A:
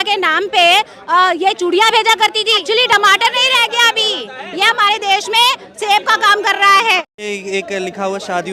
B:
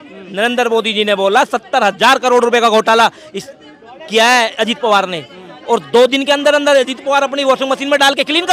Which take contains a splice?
A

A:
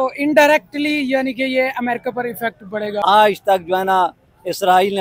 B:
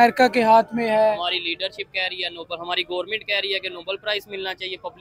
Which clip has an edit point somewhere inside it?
A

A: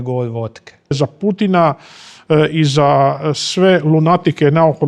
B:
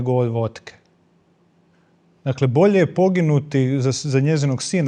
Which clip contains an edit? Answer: A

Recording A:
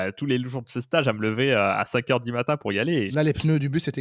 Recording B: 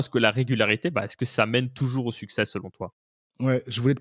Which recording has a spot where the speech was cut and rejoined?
A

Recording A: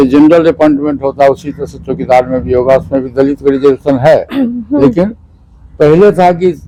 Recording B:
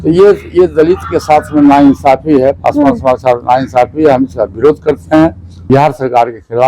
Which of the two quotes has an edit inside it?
B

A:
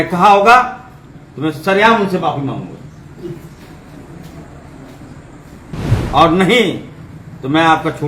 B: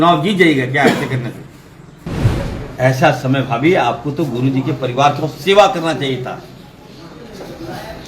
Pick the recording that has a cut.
B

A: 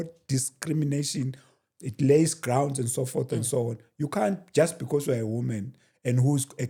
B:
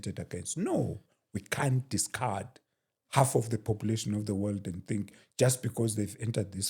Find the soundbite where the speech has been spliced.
B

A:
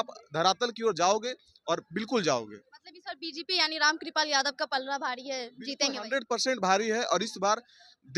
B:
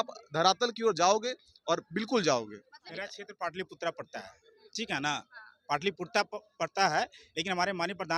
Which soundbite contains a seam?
B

